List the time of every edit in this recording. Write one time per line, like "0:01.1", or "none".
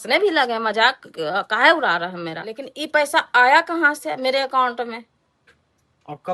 0:02.7